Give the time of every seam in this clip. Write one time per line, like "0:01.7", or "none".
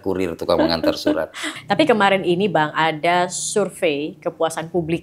0:01.5